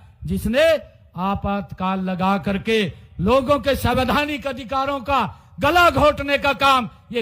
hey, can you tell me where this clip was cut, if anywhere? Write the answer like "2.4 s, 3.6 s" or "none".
none